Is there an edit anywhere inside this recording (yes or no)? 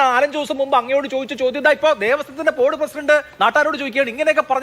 no